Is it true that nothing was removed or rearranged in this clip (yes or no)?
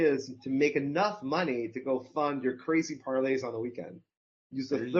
yes